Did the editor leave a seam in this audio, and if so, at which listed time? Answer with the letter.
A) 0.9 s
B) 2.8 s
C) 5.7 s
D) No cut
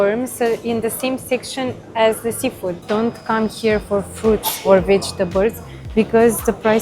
B